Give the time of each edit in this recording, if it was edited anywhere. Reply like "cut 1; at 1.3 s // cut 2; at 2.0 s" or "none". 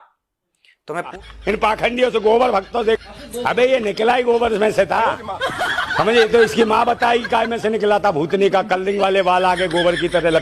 cut 1; at 1.1 s